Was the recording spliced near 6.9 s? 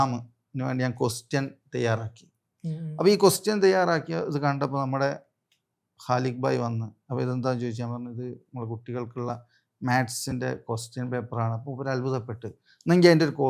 no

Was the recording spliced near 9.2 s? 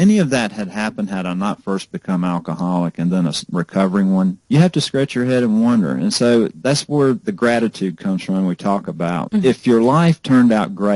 yes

